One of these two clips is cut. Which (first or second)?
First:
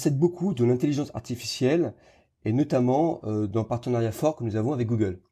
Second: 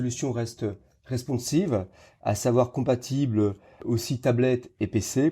second